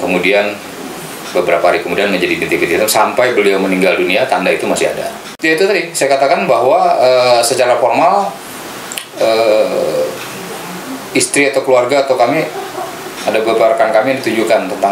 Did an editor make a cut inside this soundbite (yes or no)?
yes